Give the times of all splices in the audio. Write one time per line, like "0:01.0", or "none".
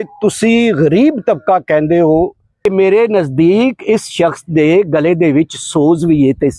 0:02.5